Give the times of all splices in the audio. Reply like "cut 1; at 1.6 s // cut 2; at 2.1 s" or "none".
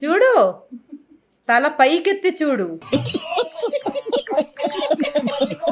none